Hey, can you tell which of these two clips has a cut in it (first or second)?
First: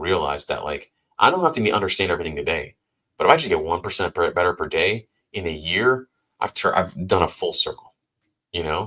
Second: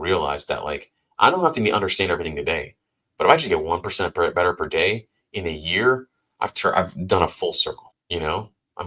second